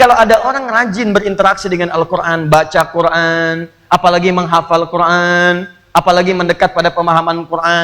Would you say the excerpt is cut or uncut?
uncut